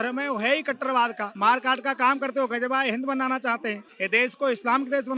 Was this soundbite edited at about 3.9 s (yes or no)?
yes